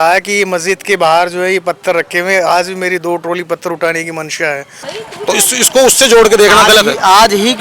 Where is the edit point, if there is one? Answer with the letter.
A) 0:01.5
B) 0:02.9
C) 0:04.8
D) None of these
C